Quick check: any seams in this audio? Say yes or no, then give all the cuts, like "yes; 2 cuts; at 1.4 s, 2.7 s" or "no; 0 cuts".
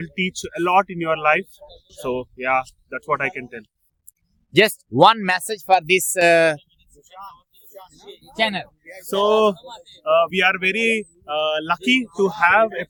no; 0 cuts